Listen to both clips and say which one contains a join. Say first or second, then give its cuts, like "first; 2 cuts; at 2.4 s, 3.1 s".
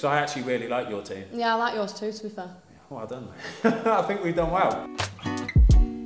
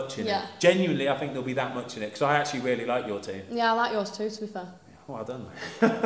first; 1 cut; at 4.8 s